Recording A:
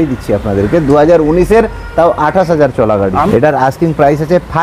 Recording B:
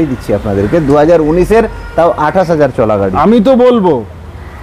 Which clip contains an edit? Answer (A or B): A